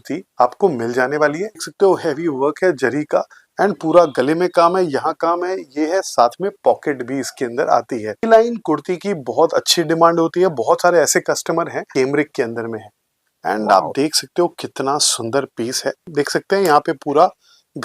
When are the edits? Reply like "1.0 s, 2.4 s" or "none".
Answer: 1.6 s, 8.2 s, 11.9 s, 16.1 s